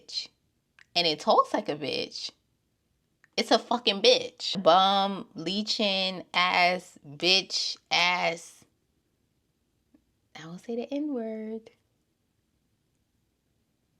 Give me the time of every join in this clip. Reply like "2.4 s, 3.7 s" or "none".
4.6 s